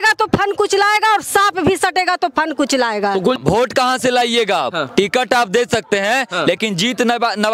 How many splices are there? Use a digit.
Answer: 1